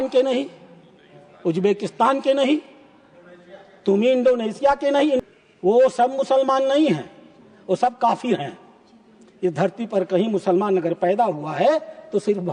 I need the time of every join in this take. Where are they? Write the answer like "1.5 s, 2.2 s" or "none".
5.2 s